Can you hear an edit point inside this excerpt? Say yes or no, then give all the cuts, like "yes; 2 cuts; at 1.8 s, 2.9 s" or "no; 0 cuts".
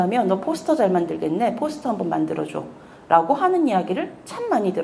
no; 0 cuts